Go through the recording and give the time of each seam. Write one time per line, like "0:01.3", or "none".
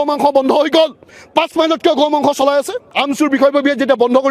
0:02.8